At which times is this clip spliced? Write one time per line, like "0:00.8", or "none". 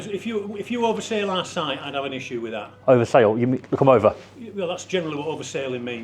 none

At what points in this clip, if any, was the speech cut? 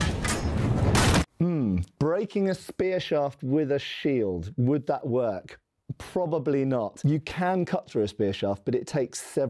0:01.2
0:06.9

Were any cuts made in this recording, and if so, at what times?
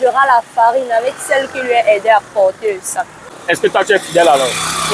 0:03.4

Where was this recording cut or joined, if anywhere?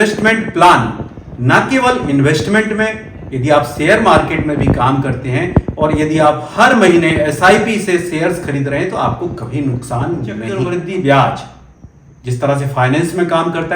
0:10.5

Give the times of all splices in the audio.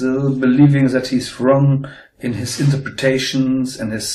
0:02.3

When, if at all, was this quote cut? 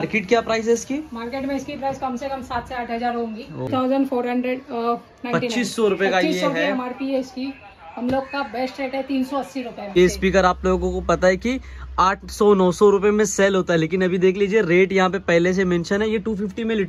0:03.7
0:10.0

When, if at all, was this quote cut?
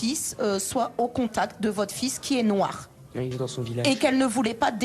0:03.3

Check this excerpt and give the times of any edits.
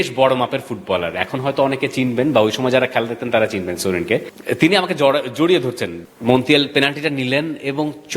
0:04.3
0:05.9

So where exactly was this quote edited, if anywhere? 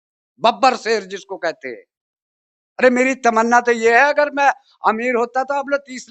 none

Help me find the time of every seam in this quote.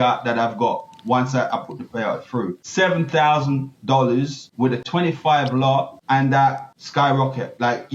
0:02.6
0:04.9
0:06.0
0:06.7

